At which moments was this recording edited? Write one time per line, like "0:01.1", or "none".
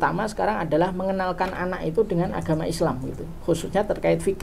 none